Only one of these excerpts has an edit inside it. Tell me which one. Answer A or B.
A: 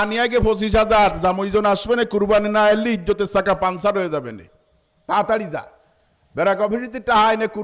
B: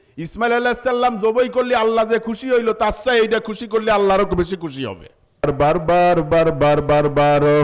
B